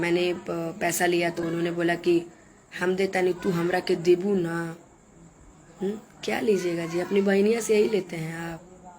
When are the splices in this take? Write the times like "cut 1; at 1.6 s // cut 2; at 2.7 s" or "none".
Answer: cut 1; at 1.4 s